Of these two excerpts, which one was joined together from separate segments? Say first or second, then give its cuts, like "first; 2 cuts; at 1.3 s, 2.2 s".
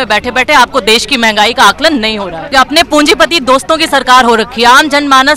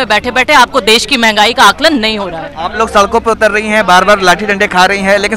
first; 1 cut; at 2.4 s